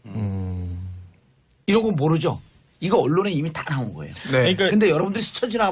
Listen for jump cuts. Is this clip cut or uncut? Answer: cut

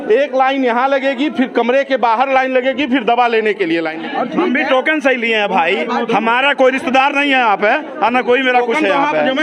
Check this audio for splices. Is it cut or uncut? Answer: cut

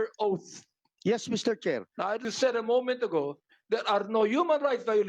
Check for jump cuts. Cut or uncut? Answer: cut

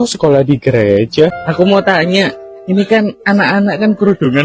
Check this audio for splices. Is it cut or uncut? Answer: cut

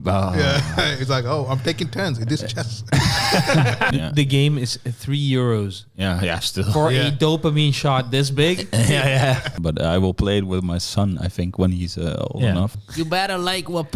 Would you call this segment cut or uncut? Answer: cut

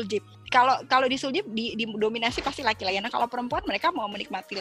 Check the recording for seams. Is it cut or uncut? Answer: uncut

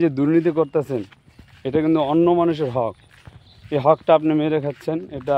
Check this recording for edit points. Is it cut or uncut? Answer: uncut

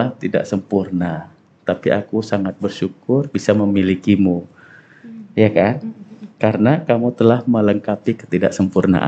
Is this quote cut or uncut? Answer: uncut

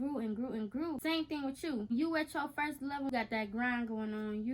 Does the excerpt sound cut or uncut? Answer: cut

